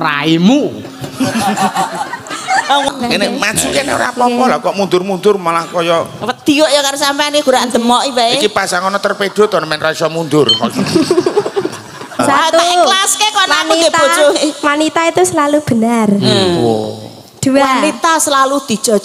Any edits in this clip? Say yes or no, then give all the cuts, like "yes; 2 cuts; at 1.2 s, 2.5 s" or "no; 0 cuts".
yes; 2 cuts; at 2.9 s, 12.2 s